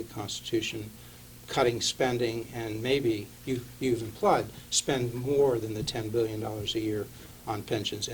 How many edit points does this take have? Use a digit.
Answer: 0